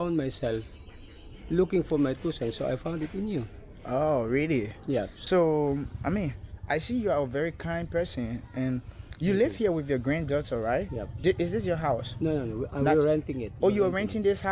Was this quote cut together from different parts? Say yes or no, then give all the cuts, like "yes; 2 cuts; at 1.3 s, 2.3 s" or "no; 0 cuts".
yes; 1 cut; at 5.1 s